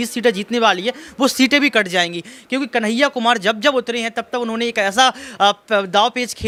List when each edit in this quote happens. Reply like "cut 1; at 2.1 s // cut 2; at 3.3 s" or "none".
none